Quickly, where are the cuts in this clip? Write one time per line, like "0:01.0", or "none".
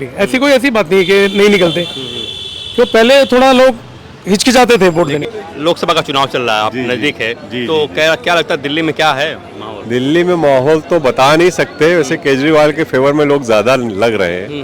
0:05.3